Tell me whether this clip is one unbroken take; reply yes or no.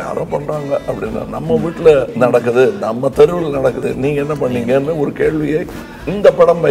no